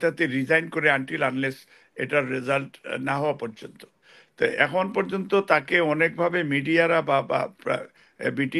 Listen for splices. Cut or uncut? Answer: uncut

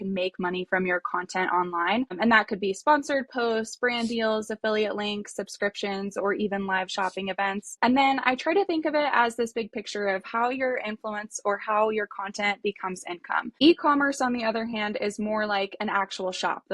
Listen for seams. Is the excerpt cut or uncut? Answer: cut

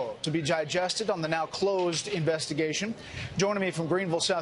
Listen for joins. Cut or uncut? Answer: cut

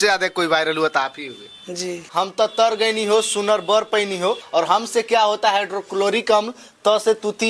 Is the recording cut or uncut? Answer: cut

